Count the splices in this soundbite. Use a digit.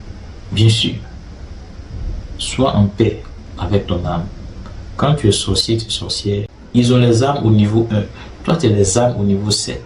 1